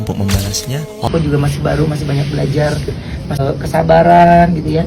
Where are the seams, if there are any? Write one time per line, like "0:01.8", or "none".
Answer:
0:01.1